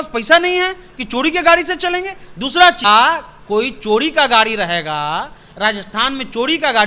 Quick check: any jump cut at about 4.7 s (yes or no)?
no